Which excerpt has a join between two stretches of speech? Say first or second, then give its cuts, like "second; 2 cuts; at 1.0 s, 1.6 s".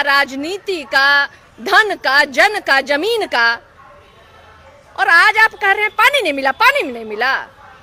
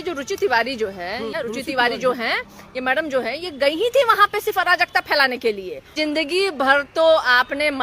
second; 2 cuts; at 1.3 s, 5.9 s